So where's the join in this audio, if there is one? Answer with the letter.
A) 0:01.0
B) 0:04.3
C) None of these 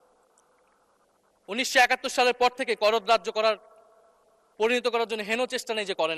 C